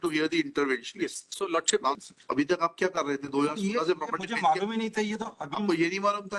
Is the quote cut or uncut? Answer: cut